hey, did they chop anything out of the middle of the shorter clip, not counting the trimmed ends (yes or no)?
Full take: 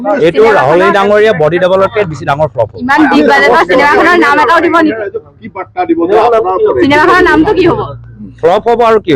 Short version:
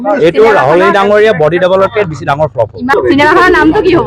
yes